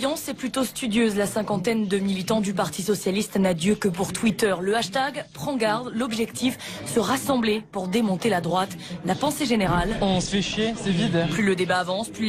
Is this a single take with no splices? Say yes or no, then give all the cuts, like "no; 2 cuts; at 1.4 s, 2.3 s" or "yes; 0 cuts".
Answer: yes; 0 cuts